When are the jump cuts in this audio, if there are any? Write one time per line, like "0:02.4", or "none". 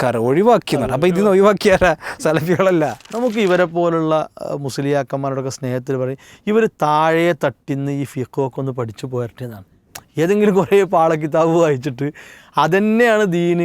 0:03.0